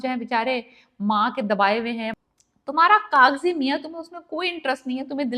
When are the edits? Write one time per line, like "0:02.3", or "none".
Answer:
0:02.1